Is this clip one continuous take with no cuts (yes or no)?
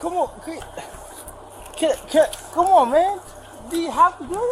yes